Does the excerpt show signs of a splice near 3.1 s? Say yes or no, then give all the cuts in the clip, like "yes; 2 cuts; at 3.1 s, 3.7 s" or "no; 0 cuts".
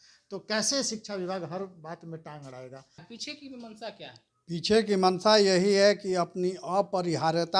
yes; 1 cut; at 3.1 s